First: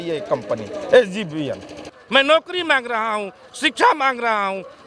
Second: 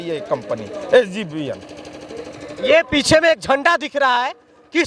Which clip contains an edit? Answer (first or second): first